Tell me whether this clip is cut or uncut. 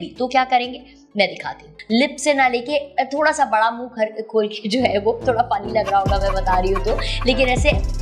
cut